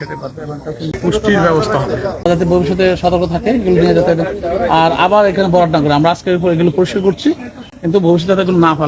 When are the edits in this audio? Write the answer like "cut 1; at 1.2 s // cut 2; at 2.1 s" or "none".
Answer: cut 1; at 0.9 s // cut 2; at 2.3 s

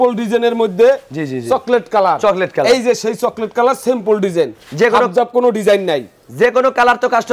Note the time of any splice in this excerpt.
none

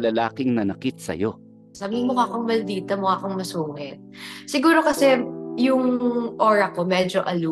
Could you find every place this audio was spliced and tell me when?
cut 1; at 1.7 s

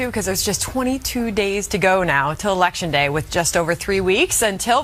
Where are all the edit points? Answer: cut 1; at 3.2 s

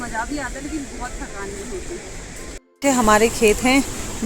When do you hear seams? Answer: cut 1; at 2.6 s

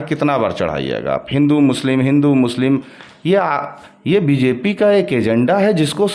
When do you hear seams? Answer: none

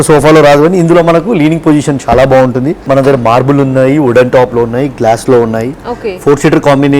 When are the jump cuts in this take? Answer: cut 1; at 2.8 s

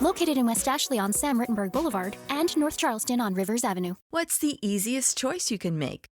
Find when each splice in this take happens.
cut 1; at 4.0 s

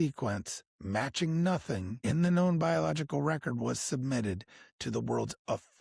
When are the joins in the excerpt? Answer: cut 1; at 1.9 s

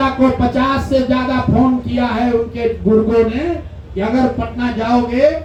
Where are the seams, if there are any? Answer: none

